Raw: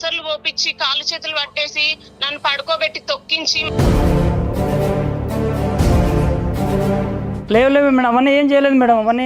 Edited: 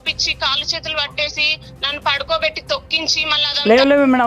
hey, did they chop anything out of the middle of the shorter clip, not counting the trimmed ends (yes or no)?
yes